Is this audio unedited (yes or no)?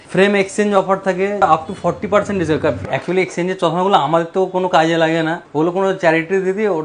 no